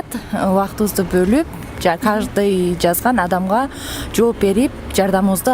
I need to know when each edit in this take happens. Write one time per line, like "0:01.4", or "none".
none